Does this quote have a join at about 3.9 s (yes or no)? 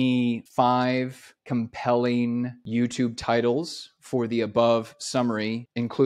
no